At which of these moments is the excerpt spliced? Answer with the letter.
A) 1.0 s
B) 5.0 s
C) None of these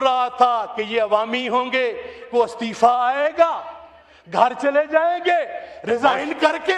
C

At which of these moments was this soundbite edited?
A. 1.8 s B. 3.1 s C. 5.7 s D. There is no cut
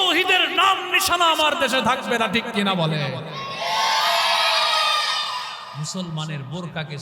C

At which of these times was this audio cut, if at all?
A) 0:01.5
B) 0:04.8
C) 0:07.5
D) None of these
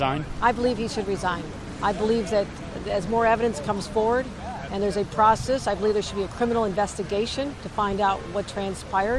D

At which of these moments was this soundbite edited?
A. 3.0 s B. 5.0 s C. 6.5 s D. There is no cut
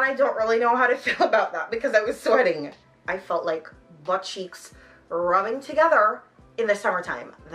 A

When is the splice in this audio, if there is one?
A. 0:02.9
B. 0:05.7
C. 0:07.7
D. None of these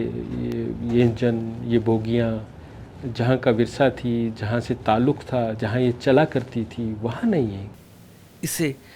C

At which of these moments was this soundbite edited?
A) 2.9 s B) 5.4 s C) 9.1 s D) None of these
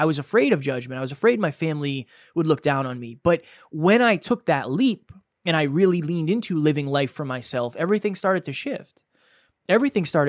A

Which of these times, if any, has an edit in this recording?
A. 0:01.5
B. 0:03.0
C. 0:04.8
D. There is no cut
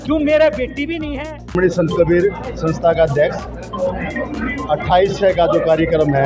A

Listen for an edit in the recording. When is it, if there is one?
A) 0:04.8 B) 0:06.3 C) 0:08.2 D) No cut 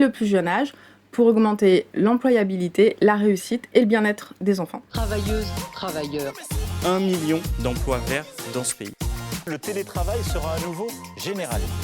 A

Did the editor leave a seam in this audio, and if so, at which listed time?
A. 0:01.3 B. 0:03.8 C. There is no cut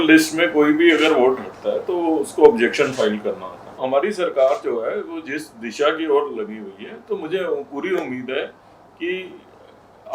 B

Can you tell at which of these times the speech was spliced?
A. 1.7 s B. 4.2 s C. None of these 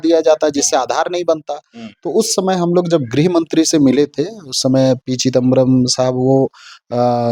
C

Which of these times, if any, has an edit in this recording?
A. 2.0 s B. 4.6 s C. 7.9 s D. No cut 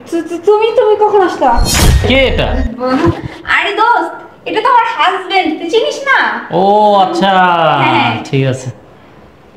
A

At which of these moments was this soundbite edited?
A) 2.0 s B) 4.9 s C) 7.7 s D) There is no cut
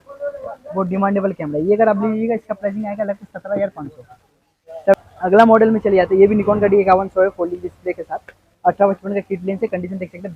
B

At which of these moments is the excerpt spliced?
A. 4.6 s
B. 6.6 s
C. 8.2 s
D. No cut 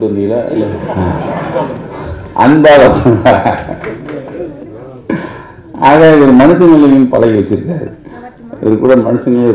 D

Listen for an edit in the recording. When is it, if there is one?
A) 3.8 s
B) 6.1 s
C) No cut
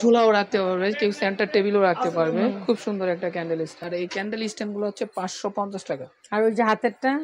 A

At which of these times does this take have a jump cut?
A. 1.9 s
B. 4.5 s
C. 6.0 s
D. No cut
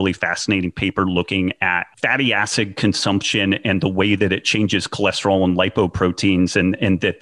A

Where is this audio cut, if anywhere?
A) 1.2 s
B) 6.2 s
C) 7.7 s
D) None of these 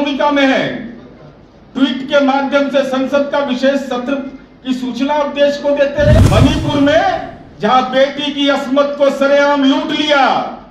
B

